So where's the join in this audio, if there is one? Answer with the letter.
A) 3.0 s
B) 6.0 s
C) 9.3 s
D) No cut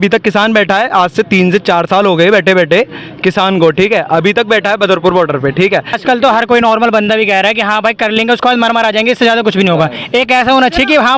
B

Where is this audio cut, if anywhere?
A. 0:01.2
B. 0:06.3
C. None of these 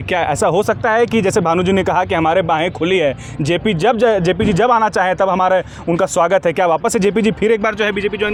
C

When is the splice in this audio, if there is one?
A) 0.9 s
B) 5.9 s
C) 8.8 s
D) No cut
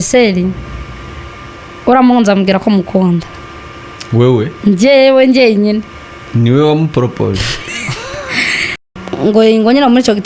C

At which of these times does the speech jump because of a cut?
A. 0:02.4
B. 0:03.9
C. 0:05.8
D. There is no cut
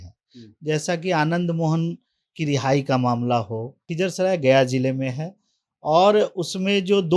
B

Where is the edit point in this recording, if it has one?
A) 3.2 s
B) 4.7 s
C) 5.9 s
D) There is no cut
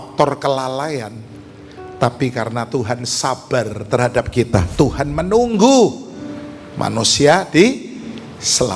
B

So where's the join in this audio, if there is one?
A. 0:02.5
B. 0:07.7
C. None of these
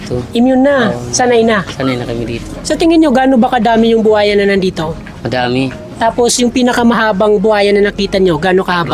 A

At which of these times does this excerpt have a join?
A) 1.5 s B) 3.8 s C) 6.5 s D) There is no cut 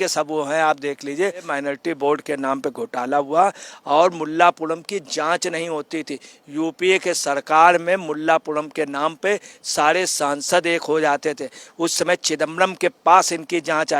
A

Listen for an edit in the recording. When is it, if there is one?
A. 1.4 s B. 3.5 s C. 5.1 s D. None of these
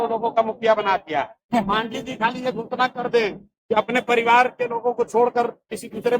A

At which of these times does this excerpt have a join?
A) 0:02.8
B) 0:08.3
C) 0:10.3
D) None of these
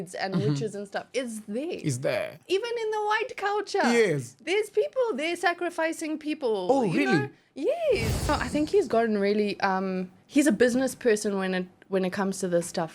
B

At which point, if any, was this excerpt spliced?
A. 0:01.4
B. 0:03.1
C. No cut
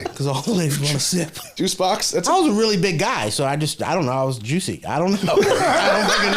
A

